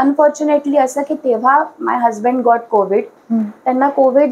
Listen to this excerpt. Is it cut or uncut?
cut